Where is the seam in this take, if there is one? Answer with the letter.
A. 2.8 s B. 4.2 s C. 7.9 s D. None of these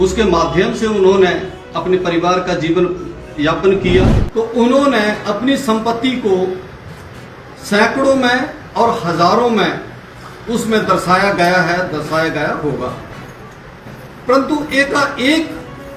B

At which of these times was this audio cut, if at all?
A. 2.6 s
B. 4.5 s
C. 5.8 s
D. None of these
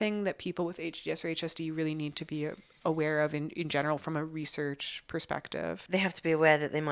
C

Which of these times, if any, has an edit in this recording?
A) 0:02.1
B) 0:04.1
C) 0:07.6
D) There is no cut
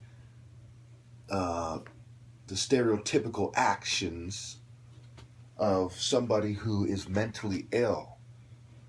B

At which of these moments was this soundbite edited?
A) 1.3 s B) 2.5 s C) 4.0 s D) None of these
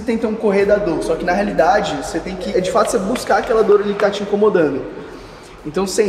B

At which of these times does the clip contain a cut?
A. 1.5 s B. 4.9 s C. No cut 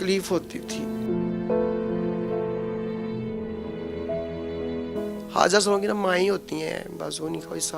B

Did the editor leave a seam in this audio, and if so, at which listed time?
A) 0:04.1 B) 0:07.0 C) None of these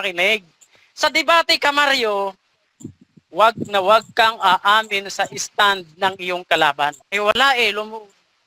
B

